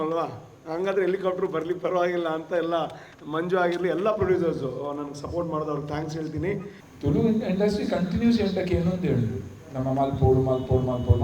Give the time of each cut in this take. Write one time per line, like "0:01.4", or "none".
0:06.8